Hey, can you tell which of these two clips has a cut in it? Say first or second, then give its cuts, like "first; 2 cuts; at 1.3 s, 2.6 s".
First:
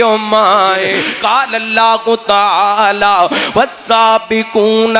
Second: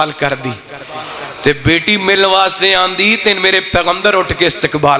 first; 1 cut; at 1.1 s